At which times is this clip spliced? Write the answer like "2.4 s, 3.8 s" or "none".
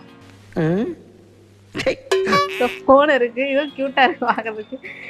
2.5 s